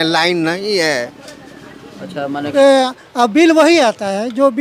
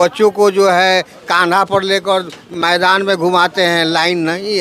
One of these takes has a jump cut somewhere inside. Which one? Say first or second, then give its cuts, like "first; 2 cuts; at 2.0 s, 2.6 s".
first; 1 cut; at 2.5 s